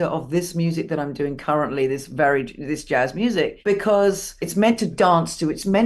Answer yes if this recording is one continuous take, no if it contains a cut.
no